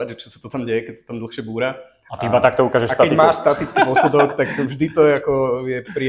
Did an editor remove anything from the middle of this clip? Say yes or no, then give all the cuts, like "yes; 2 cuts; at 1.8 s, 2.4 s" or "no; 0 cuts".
no; 0 cuts